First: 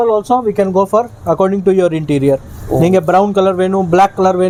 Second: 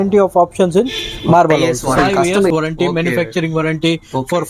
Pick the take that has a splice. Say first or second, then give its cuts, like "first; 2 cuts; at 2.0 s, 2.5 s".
second; 1 cut; at 2.5 s